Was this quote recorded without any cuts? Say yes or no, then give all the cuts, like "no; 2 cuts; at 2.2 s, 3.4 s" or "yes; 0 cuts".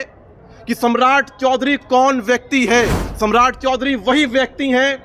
no; 1 cut; at 3.0 s